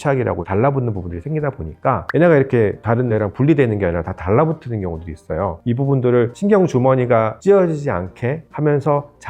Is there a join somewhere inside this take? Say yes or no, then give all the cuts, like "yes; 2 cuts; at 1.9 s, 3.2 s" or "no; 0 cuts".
yes; 7 cuts; at 1.1 s, 2.0 s, 3.1 s, 5.6 s, 6.3 s, 7.3 s, 8.5 s